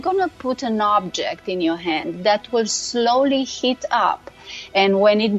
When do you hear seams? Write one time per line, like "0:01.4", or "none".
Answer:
none

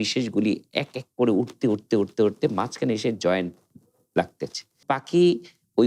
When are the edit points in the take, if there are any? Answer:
0:04.8

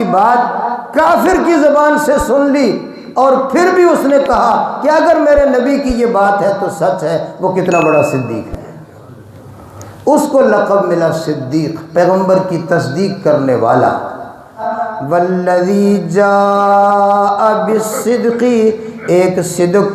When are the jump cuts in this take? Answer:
0:14.8

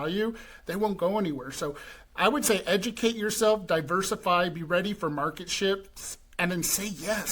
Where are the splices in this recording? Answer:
none

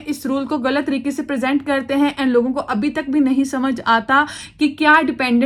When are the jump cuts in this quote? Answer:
none

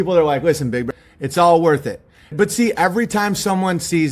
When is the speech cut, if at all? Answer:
0:00.9
0:02.3

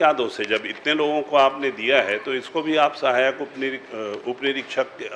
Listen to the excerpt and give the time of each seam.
none

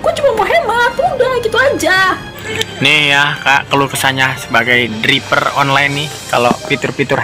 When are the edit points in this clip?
0:02.7

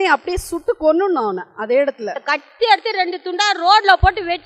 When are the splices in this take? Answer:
0:02.2

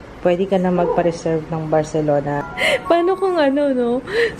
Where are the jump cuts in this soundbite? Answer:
0:02.5

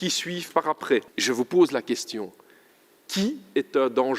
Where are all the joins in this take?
0:01.1

